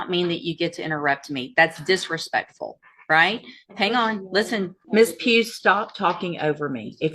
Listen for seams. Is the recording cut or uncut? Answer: cut